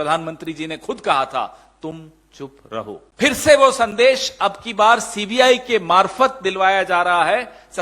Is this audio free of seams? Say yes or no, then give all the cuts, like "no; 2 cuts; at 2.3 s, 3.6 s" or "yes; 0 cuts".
no; 1 cut; at 3.1 s